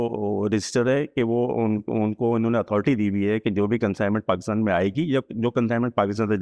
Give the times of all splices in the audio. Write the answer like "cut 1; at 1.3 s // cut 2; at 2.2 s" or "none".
none